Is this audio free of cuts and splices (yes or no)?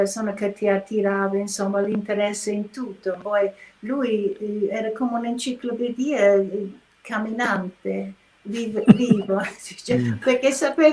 yes